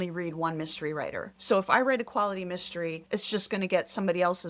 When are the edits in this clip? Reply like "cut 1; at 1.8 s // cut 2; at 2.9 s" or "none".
cut 1; at 1.3 s // cut 2; at 3.0 s